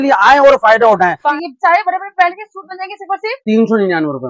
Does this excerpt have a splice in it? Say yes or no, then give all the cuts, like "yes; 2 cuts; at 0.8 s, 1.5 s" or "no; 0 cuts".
yes; 1 cut; at 1.2 s